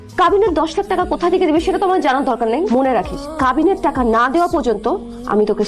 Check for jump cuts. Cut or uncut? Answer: uncut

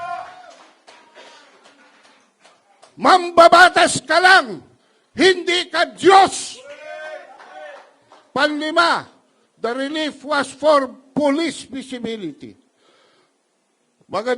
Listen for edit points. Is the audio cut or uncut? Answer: uncut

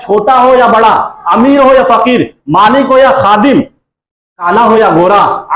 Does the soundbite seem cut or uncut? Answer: uncut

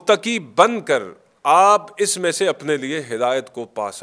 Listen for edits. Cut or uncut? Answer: uncut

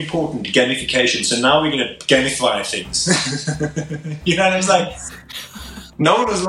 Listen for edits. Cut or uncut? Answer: uncut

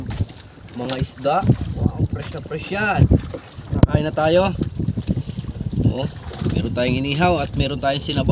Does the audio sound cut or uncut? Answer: cut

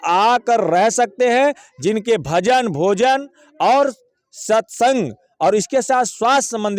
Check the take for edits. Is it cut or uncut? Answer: uncut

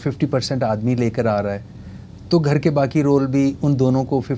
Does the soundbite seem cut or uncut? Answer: uncut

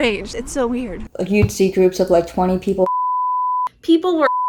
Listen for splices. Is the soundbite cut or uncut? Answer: uncut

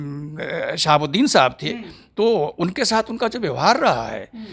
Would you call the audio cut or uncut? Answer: uncut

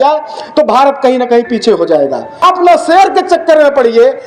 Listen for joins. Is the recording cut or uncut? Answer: cut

